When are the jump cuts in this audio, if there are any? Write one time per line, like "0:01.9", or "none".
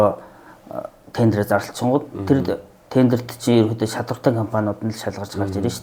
none